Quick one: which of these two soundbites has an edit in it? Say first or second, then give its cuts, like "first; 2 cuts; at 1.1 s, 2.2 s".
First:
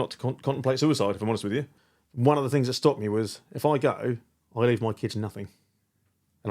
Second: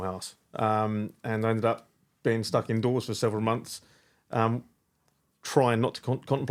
first; 1 cut; at 1.8 s